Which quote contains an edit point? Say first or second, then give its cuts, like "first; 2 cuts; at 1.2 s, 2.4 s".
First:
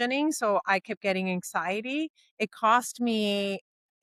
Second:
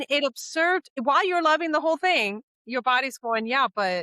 second; 1 cut; at 0.9 s